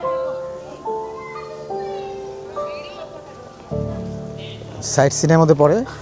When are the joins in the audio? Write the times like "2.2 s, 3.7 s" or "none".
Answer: none